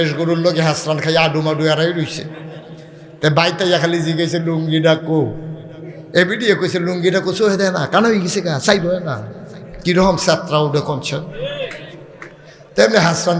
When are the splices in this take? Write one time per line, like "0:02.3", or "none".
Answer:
none